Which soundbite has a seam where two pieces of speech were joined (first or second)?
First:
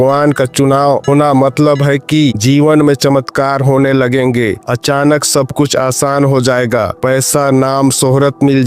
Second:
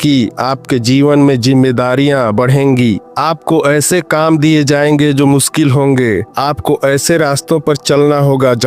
first